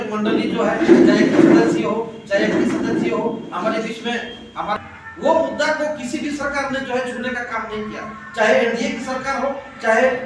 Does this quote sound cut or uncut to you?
cut